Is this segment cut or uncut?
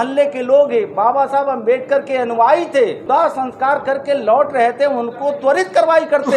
cut